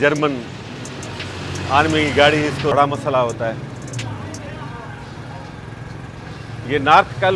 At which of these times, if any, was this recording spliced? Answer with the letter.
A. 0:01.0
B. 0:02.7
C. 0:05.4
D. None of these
B